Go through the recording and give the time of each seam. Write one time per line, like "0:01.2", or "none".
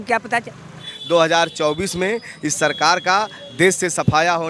0:00.9